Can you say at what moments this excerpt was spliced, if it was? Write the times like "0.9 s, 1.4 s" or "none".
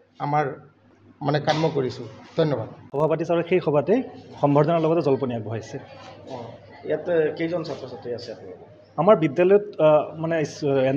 2.8 s